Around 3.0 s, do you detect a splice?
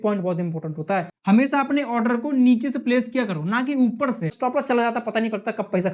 no; 2 cuts; at 1.1 s, 4.4 s

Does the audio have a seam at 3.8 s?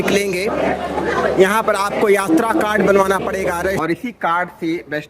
yes; 1 cut; at 3.8 s

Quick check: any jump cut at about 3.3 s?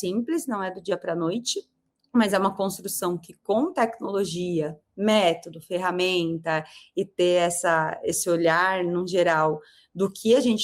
no; 0 cuts

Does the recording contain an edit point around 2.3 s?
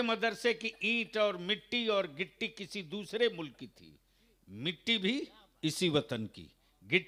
no; 0 cuts

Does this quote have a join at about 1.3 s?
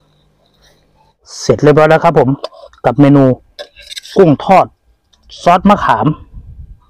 yes; 1 cut; at 1.3 s

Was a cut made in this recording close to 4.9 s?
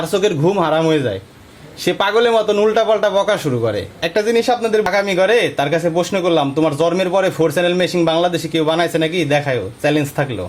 yes; 1 cut; at 4.9 s

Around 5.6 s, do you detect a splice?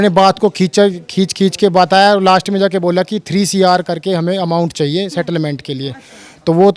no; 0 cuts

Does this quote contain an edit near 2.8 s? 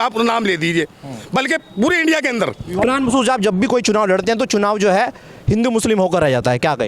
yes; 1 cut; at 2.8 s

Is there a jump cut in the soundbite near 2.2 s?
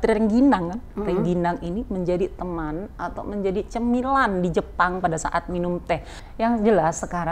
no; 1 cut; at 6.2 s

